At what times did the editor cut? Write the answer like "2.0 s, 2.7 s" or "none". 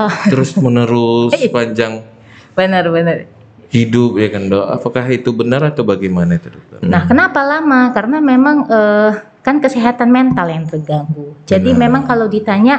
6.6 s